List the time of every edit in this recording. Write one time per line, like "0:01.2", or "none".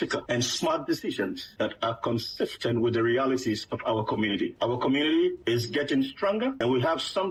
none